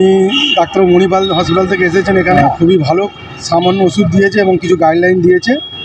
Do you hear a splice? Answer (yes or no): yes